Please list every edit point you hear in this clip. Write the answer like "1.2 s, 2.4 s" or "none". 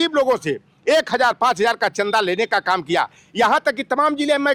none

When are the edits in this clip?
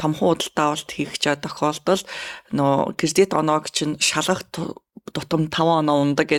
none

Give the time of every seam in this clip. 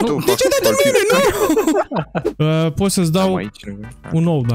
2.2 s

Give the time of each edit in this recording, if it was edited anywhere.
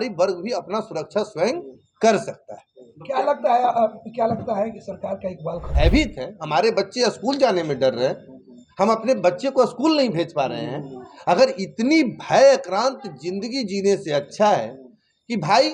5.7 s

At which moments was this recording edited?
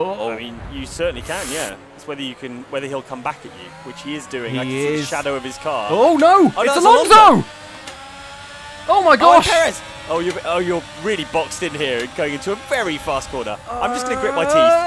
none

